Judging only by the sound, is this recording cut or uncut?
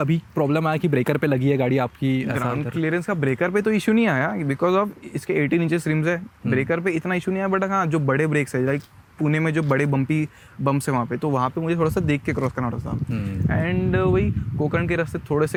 uncut